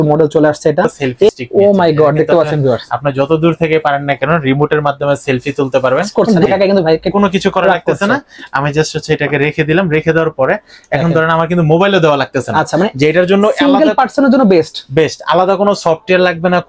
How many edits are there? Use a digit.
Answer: 2